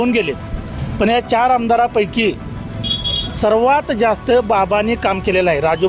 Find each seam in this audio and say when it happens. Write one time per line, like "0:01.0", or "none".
none

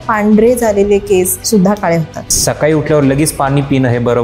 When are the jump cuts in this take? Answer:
0:01.4
0:02.3

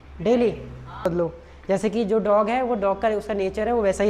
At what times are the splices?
0:01.1

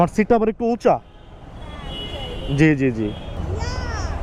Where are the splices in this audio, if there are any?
none

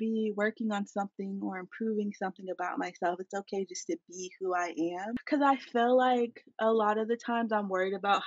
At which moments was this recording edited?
0:05.2

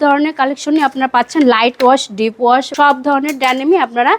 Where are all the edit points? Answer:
0:02.7

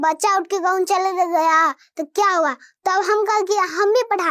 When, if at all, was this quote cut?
none

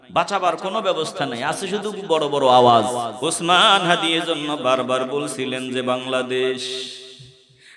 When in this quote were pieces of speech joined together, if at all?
0:03.1

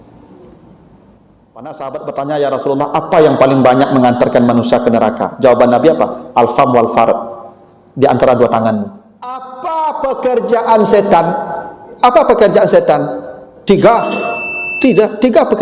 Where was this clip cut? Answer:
0:01.8
0:09.5

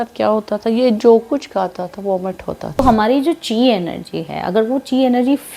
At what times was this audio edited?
0:02.8

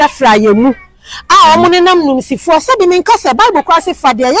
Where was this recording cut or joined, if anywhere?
none

